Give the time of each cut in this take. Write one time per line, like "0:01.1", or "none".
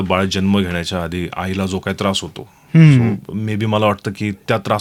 none